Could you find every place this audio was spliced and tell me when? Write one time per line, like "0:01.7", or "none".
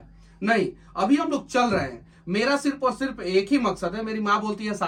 none